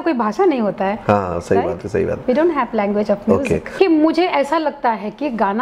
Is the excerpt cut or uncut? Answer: cut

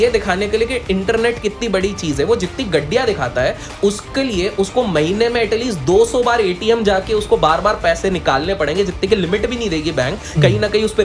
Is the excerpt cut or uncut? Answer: uncut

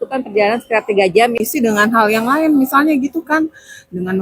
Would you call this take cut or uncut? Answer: cut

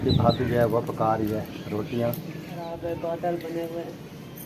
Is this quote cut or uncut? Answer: cut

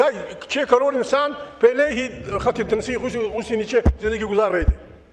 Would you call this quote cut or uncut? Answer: uncut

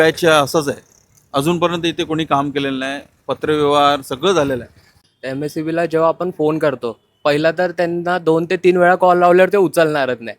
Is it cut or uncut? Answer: cut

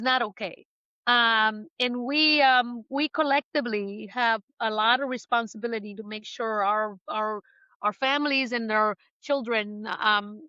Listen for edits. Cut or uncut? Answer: uncut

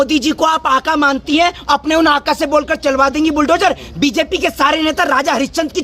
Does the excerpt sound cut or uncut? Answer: uncut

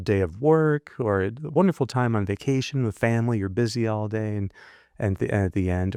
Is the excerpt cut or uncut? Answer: uncut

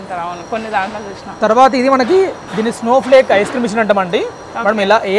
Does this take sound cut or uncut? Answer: uncut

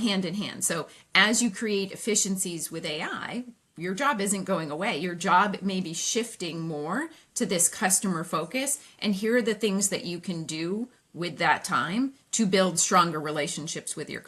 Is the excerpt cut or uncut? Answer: uncut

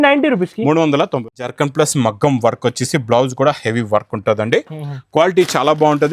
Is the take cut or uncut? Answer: uncut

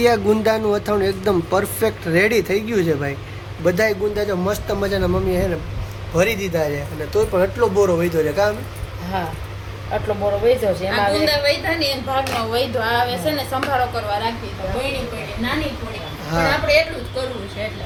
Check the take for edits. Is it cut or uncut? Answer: uncut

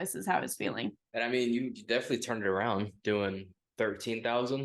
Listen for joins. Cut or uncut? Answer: cut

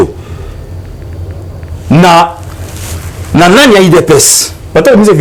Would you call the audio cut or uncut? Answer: uncut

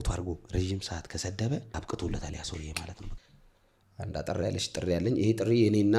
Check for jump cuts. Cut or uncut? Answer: cut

